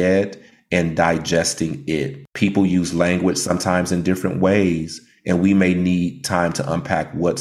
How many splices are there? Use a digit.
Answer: 1